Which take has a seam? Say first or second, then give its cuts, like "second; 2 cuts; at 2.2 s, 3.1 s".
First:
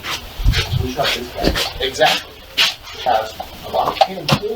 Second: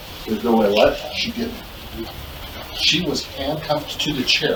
first; 1 cut; at 2.9 s